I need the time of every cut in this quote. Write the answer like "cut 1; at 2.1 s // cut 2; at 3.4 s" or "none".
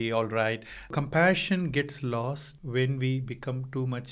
cut 1; at 0.9 s // cut 2; at 2.5 s